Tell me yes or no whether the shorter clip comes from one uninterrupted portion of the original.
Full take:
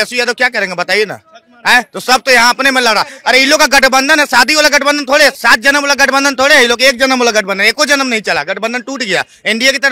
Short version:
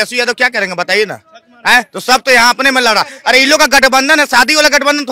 yes